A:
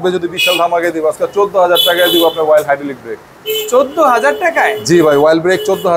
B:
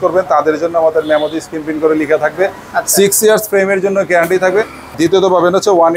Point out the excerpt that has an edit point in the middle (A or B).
B